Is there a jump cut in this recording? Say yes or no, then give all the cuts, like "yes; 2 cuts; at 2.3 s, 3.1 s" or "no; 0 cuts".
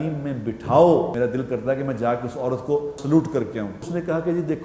yes; 3 cuts; at 1.1 s, 3.0 s, 3.9 s